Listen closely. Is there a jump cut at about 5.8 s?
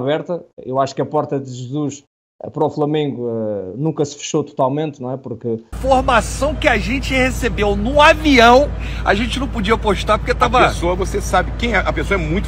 yes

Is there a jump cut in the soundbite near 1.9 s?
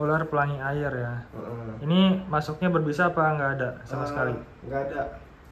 no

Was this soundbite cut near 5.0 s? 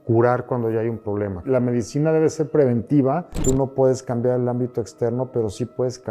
no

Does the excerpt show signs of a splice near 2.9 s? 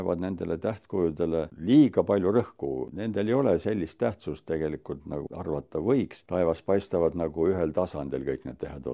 yes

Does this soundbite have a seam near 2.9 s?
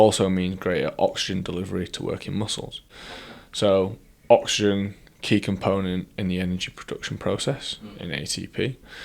no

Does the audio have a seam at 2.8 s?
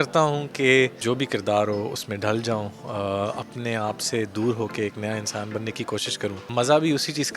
no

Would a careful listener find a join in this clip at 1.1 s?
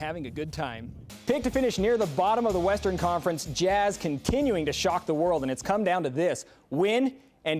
yes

